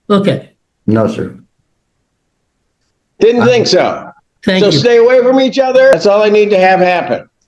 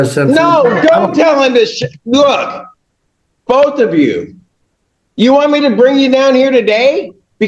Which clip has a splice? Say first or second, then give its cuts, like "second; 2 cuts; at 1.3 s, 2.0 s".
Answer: first; 1 cut; at 5.9 s